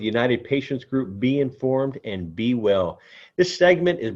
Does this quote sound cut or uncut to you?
uncut